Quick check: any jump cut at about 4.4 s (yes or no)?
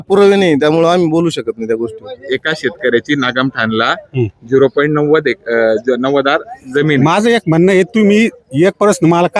no